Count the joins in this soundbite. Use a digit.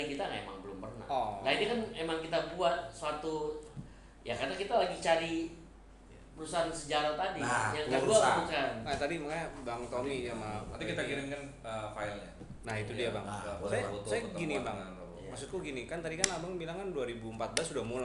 0